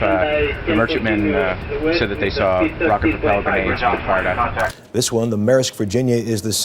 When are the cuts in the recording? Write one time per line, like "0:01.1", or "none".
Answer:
0:04.8

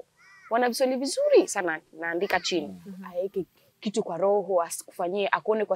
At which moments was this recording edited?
0:03.0

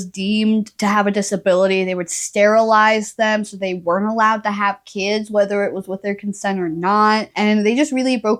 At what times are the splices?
none

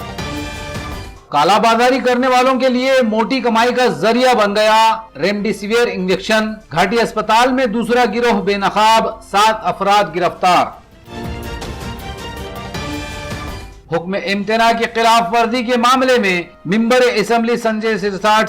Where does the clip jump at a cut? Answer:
0:01.0

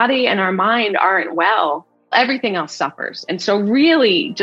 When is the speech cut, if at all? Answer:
0:02.1

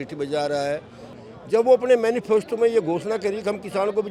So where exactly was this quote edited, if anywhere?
0:01.1

